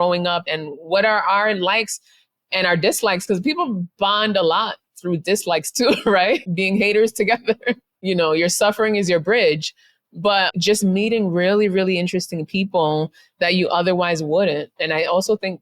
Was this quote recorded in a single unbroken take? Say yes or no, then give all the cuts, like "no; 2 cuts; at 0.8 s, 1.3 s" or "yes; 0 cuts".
yes; 0 cuts